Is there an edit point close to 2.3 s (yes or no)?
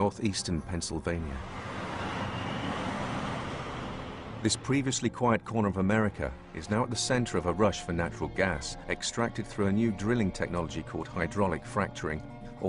yes